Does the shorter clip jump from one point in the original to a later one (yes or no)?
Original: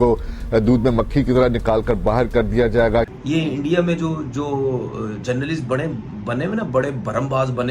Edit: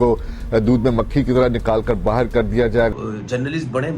yes